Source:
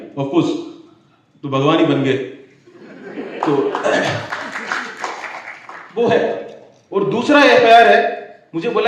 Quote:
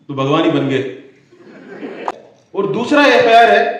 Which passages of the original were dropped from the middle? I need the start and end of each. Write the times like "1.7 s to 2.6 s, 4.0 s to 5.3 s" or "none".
3.5 s to 6.5 s